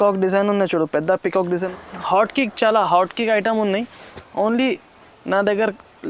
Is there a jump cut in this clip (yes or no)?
yes